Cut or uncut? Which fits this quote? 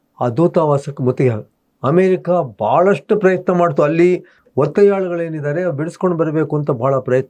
uncut